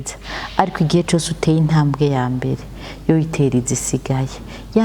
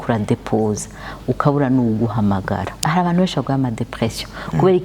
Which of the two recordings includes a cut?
second; 1 cut; at 2.8 s

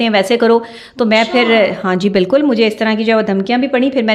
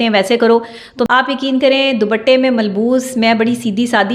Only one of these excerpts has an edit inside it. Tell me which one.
second; 1 cut; at 1.1 s

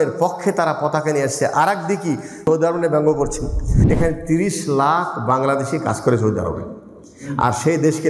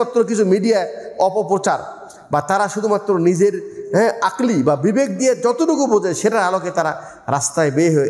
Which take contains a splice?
first; 2 cuts; at 2.4 s, 3.7 s

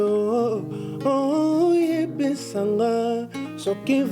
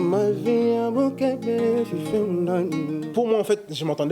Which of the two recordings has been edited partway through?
second; 1 cut; at 3.0 s

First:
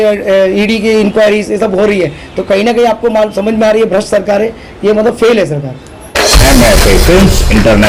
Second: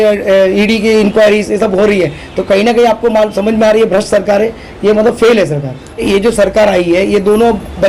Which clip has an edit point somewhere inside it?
second; 1 cut; at 6.1 s

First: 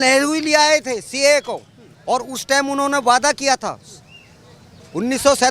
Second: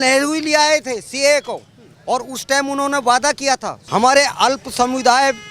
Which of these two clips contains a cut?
second; 1 cut; at 3.7 s

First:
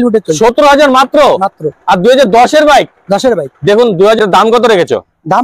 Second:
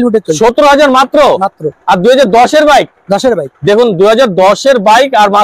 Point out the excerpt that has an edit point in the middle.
first; 1 cut; at 4.2 s

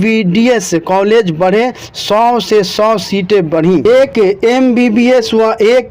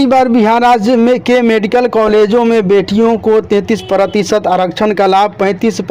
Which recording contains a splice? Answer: first; 1 cut; at 3.8 s

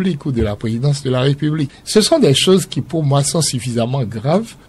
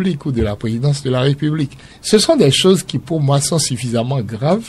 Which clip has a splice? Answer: first; 1 cut; at 1.8 s

